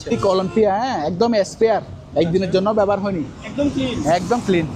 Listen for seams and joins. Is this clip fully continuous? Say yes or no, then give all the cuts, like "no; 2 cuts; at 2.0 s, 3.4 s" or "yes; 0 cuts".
yes; 0 cuts